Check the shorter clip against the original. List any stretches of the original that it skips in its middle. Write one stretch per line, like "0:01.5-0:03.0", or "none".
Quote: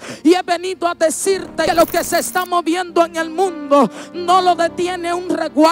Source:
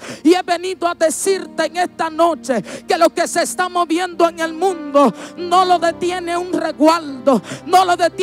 0:01.7-0:02.9